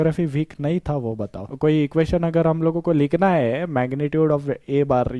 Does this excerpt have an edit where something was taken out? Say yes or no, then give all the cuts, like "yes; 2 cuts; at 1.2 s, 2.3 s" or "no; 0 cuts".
yes; 1 cut; at 1.4 s